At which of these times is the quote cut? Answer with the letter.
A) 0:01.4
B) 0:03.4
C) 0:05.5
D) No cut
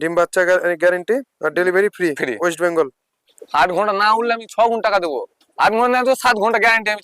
B